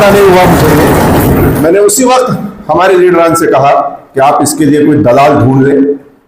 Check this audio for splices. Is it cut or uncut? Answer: cut